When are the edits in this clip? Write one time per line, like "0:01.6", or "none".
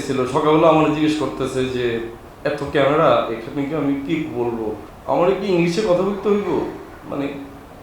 0:02.2
0:04.9

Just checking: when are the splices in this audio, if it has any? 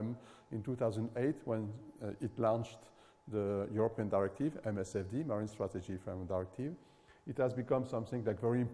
0:04.5

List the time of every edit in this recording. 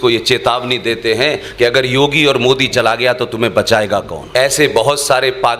0:04.2

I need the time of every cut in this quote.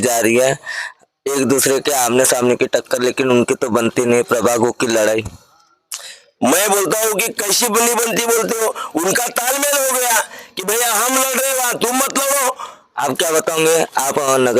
0:12.9

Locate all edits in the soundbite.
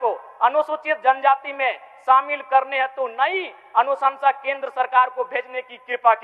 none

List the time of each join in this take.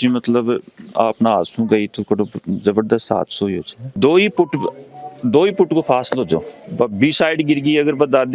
0:03.9
0:06.6

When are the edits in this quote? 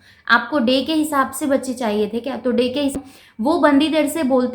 0:02.9

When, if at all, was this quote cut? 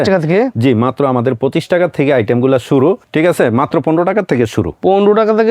0:03.0

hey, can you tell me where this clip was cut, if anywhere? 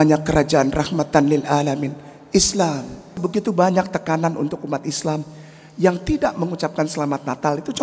0:03.1

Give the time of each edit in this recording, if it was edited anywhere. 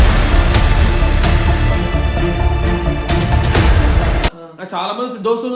0:04.5

